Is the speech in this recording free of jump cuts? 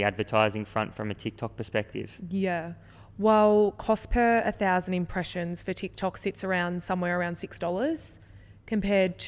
yes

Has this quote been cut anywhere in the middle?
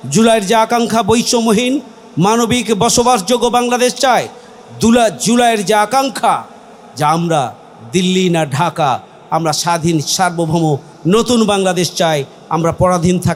no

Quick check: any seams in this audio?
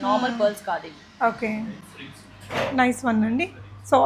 no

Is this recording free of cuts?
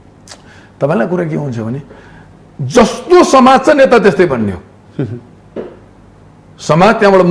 yes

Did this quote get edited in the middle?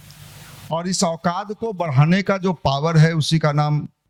no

